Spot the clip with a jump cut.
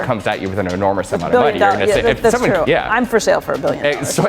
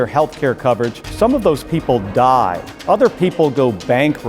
second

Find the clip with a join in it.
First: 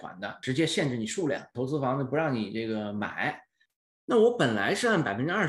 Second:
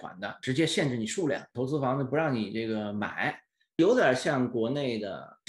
first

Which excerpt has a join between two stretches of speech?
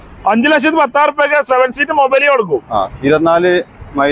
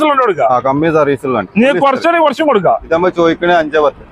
second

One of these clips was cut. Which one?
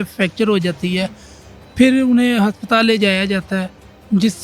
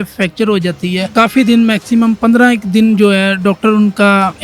second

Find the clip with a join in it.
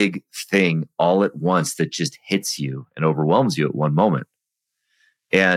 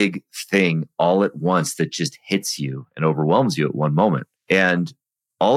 second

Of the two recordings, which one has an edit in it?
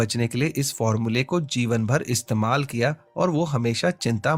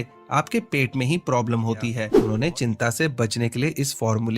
second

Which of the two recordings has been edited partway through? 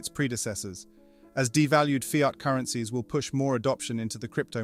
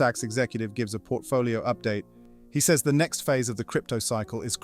second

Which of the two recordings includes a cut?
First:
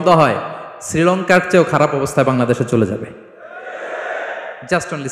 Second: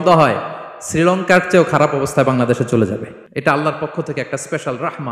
second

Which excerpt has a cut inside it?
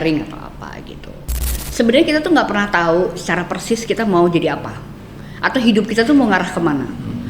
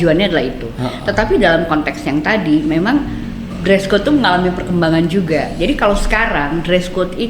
first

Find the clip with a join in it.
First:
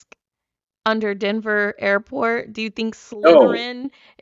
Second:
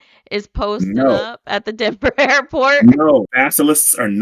second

